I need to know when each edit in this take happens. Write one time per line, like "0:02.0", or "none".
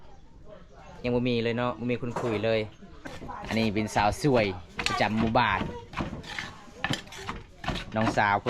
0:03.1